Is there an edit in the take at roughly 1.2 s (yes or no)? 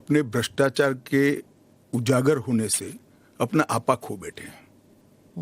yes